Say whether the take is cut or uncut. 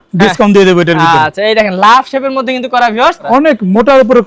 cut